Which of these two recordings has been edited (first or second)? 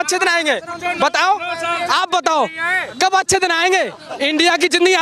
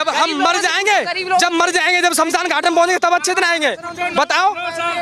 first